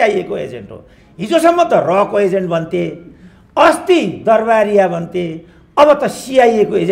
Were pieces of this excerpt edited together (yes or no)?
no